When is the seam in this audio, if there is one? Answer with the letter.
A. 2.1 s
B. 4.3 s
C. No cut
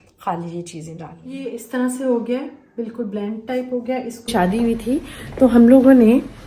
B